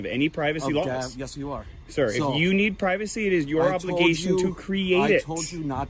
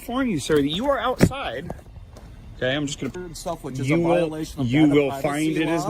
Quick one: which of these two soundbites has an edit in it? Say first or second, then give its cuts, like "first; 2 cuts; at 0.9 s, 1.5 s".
second; 1 cut; at 3.1 s